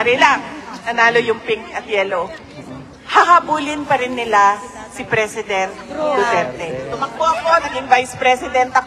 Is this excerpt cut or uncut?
cut